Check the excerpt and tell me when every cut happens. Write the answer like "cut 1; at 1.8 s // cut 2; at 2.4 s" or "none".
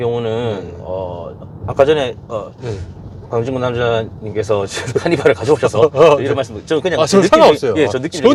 none